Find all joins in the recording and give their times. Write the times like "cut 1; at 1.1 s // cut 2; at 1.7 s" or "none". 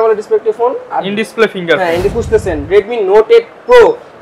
cut 1; at 2.1 s